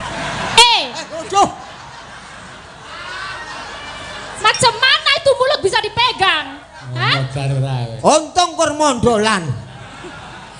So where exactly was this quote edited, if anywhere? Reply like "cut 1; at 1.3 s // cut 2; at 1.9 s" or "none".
none